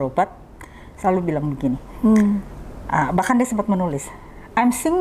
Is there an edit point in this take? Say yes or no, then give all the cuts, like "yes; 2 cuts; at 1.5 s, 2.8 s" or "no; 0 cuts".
no; 0 cuts